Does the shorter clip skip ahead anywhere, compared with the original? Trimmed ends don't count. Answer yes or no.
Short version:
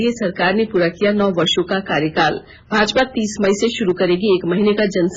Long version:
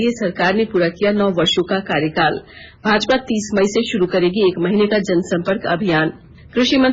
yes